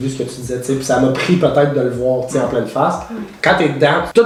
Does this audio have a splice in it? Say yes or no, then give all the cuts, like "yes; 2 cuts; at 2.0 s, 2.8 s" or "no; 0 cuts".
no; 0 cuts